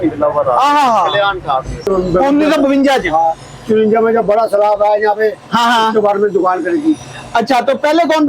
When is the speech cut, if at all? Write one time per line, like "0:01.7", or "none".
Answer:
0:01.9